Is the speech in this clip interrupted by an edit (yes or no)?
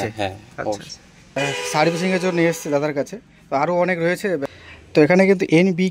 yes